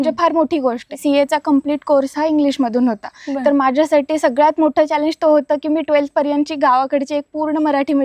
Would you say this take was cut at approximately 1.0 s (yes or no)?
yes